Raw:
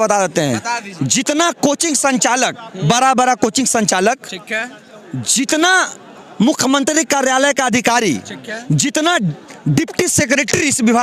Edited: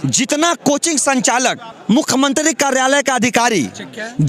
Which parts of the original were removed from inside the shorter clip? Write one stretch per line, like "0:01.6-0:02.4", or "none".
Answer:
0:02.7-0:06.2